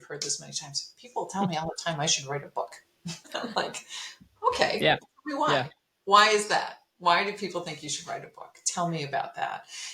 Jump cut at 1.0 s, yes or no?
no